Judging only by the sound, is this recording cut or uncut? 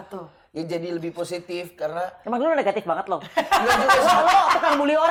uncut